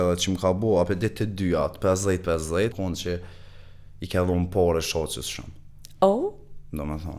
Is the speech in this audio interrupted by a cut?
yes; 1 cut; at 2.7 s

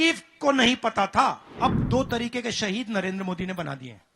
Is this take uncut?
no; 1 cut; at 1.5 s

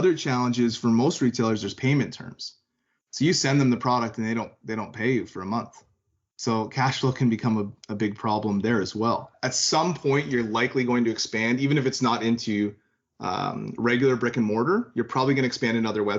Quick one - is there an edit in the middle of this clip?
yes; 1 cut; at 9.5 s

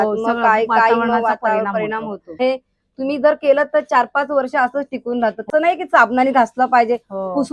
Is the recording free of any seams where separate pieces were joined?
no; 2 cuts; at 2.4 s, 5.5 s

